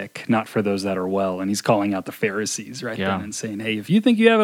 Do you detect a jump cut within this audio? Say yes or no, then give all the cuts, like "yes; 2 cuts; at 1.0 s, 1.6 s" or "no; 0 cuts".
no; 0 cuts